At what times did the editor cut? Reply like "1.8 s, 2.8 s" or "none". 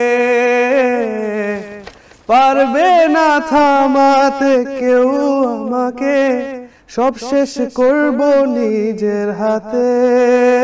none